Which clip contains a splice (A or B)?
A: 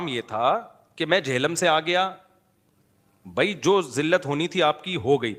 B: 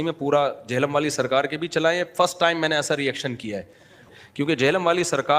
B